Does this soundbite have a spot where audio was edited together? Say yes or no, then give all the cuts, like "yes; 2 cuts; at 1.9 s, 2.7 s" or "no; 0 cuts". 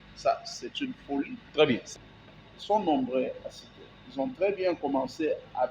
yes; 1 cut; at 1.9 s